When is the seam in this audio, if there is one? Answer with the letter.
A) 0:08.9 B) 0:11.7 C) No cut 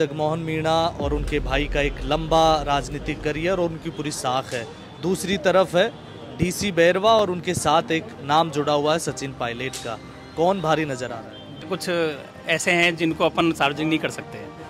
B